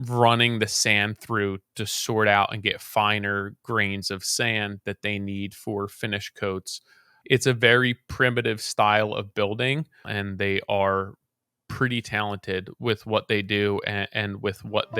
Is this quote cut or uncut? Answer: cut